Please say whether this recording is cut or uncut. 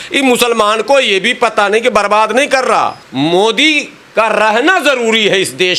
cut